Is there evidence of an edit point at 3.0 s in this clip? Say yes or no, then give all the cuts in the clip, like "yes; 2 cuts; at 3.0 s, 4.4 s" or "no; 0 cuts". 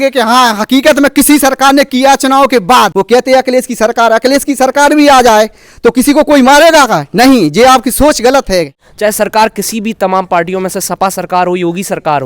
yes; 2 cuts; at 3.0 s, 8.8 s